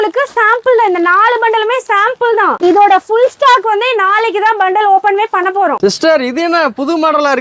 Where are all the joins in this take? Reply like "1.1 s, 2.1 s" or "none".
none